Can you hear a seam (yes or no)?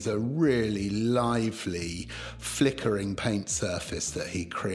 no